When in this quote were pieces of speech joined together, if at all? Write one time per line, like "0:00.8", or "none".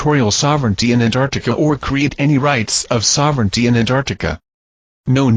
0:01.3